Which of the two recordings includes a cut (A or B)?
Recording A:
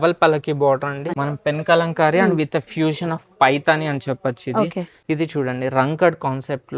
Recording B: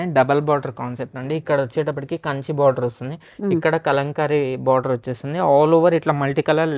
A